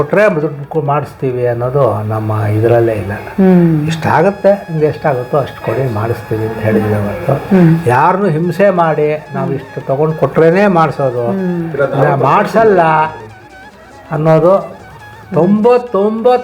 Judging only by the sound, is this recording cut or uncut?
uncut